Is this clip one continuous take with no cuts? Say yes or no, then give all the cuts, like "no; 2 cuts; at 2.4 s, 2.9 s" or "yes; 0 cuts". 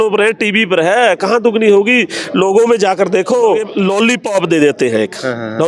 no; 1 cut; at 3.7 s